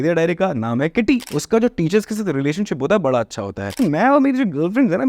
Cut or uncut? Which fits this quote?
cut